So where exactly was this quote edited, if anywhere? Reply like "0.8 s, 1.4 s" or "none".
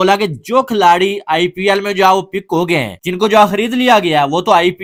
none